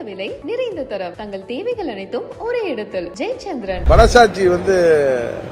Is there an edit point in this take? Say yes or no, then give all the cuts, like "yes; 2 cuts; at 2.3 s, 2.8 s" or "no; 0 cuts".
yes; 1 cut; at 3.8 s